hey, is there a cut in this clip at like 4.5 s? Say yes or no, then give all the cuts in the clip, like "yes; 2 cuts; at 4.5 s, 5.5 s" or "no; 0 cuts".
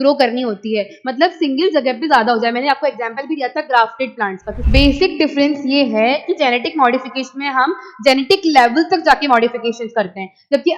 yes; 1 cut; at 4.5 s